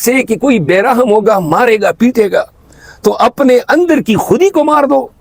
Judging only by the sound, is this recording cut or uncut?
uncut